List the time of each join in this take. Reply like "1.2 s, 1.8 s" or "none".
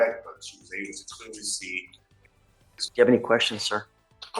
2.6 s

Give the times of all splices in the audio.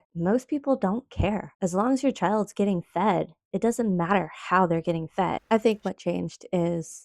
5.4 s

